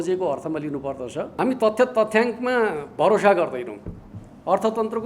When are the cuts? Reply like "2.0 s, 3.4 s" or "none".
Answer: 1.3 s